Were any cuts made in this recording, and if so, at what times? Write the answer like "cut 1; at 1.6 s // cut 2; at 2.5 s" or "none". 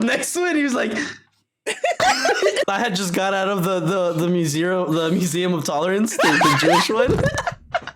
cut 1; at 2.6 s